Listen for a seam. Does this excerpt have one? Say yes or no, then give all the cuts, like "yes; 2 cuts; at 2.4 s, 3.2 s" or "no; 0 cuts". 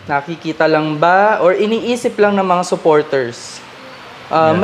no; 0 cuts